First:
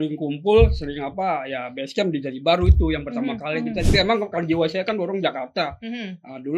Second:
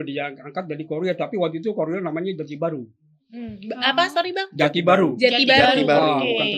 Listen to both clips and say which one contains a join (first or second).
first